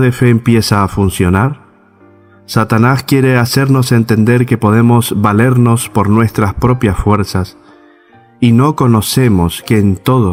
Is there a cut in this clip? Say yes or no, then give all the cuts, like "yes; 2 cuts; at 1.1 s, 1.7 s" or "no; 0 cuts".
no; 0 cuts